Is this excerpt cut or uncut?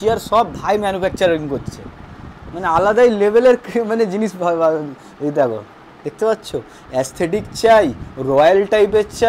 uncut